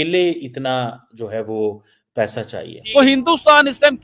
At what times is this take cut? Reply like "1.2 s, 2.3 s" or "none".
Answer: 2.7 s

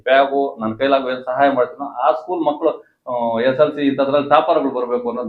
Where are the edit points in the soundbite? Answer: none

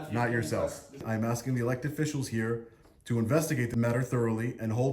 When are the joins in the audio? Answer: 1.0 s, 3.7 s

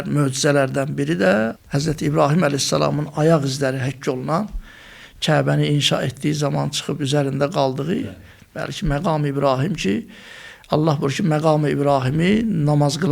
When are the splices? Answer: 1.6 s

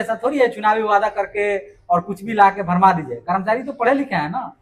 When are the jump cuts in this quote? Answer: none

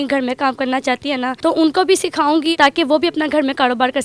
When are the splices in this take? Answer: 1.3 s, 2.5 s

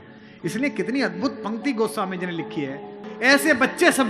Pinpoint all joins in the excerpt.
3.0 s

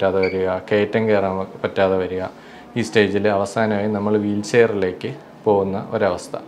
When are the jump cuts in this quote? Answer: none

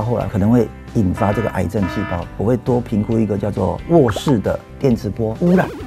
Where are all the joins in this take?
2.4 s

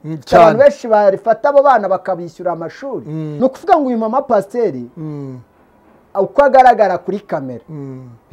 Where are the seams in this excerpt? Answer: 3.3 s

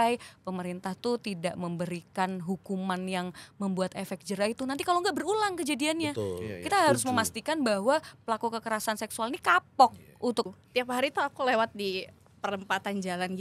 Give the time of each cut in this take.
10.5 s

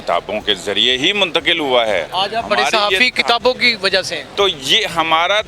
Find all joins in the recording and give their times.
2.1 s, 4.2 s

